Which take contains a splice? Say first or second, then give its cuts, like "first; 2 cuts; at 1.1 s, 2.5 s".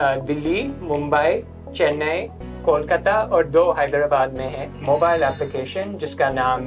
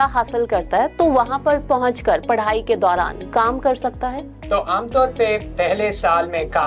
first; 1 cut; at 4.7 s